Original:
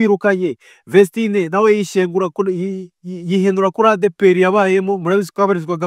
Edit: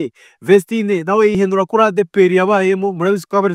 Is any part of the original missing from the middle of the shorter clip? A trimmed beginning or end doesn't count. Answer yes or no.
yes